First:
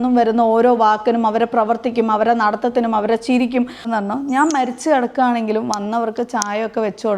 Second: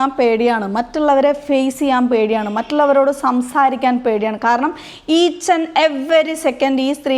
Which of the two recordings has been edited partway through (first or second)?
first